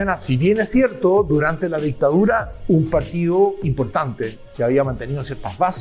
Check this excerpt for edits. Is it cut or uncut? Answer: uncut